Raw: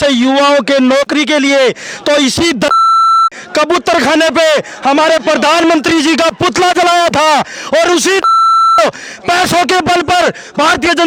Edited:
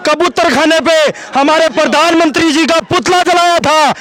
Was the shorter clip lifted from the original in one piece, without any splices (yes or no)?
yes